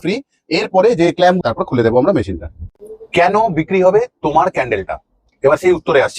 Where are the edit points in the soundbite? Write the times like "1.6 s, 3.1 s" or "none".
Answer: 1.4 s